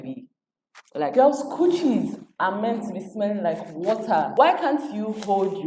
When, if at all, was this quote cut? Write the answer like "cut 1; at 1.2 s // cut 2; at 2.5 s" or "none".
cut 1; at 4.3 s